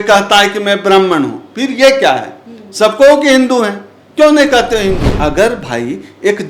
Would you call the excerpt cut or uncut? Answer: cut